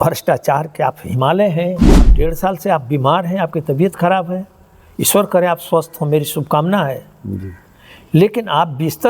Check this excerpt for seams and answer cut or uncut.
cut